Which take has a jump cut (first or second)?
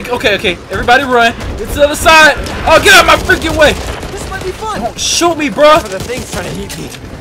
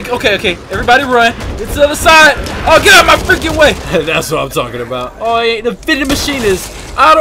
second